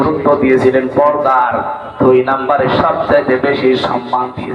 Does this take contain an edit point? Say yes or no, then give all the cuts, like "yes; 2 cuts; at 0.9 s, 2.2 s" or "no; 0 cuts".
no; 0 cuts